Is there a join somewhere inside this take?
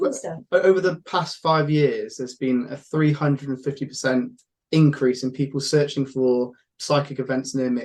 no; 0 cuts

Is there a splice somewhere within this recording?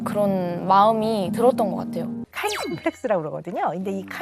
yes; 1 cut; at 2.3 s

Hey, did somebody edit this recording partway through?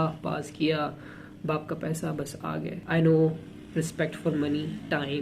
yes; 1 cut; at 2.8 s

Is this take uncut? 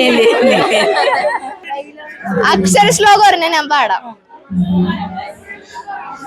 no; 1 cut; at 1.7 s

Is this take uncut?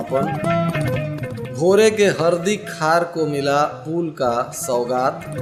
yes; 0 cuts

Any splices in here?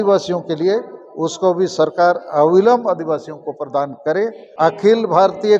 yes; 1 cut; at 4.4 s

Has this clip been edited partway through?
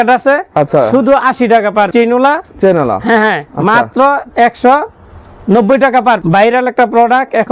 yes; 2 cuts; at 1.9 s, 6.2 s

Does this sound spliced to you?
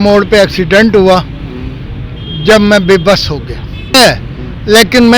yes; 1 cut; at 3.9 s

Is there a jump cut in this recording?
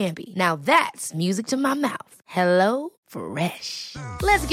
no; 0 cuts

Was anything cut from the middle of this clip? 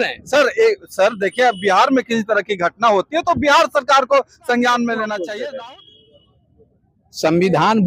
yes; 1 cut; at 5.2 s

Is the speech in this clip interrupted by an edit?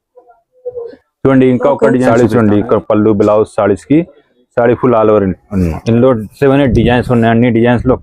yes; 1 cut; at 2.1 s

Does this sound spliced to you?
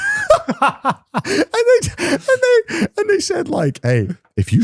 no; 0 cuts

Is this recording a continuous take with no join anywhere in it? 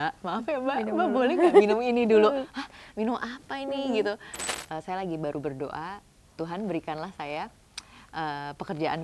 no; 1 cut; at 4.4 s

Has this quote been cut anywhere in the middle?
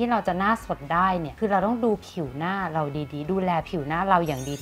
no; 0 cuts

